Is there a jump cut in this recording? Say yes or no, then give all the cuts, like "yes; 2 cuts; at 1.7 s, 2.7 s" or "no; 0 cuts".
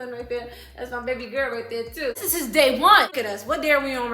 yes; 2 cuts; at 2.1 s, 3.1 s